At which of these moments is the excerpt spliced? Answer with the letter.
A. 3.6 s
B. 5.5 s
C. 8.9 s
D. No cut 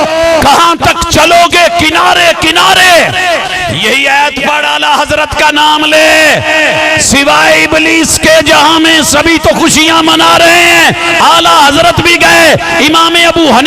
A